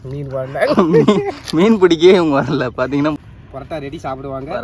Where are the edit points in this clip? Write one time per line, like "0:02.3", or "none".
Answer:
0:03.2